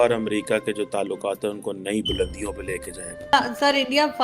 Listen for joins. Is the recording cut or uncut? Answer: cut